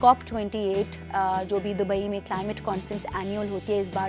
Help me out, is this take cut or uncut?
uncut